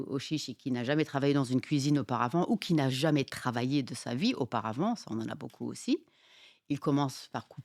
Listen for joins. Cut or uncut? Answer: uncut